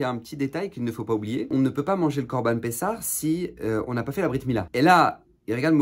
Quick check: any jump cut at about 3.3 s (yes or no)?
no